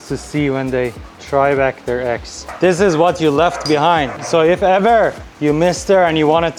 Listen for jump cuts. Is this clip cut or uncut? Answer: uncut